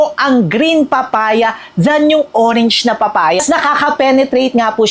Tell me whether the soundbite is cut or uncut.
cut